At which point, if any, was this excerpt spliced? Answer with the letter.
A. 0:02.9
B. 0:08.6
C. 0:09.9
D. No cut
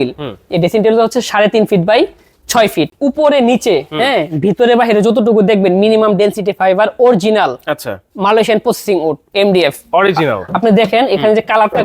A